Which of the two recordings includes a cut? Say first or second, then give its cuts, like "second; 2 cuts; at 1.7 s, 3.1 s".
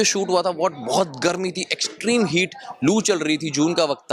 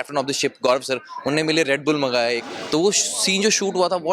second; 1 cut; at 2.5 s